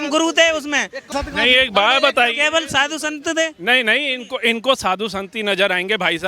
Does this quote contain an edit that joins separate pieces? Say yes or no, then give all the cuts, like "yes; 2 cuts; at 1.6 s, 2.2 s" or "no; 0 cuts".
yes; 1 cut; at 1.1 s